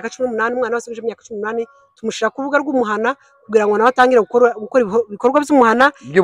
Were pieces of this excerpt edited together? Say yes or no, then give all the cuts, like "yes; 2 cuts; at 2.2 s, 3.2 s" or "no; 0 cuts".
no; 0 cuts